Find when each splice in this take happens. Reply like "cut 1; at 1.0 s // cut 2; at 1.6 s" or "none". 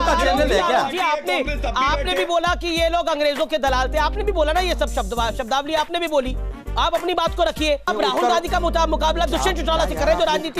cut 1; at 0.9 s